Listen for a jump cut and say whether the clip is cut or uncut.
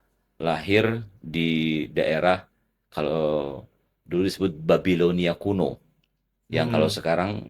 uncut